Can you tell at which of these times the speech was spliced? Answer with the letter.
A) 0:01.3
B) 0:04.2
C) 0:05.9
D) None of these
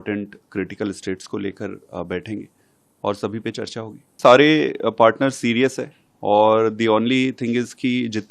B